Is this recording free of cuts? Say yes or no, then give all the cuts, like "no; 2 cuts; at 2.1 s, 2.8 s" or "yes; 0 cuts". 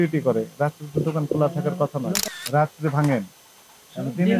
no; 1 cut; at 2.3 s